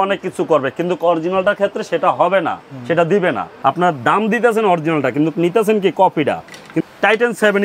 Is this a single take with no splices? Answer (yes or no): no